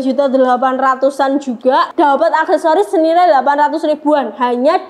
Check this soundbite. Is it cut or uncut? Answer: cut